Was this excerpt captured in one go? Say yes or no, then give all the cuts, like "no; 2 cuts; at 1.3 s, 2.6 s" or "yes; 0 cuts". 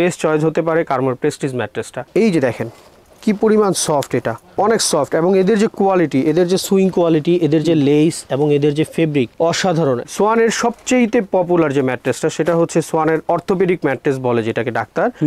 no; 2 cuts; at 2.1 s, 10.0 s